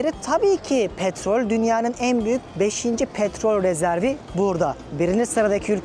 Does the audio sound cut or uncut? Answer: uncut